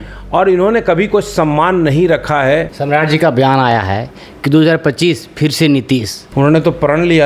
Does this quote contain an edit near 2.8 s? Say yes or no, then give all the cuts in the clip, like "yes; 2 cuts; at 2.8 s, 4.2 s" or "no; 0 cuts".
yes; 2 cuts; at 2.8 s, 6.2 s